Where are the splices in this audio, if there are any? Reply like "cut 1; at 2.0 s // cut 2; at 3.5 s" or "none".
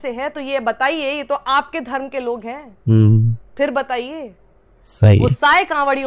none